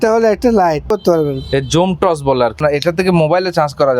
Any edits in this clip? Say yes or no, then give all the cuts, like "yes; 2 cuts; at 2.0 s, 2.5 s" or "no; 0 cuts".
yes; 2 cuts; at 0.9 s, 2.6 s